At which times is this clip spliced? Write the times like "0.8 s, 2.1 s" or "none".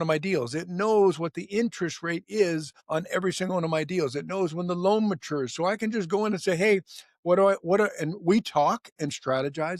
none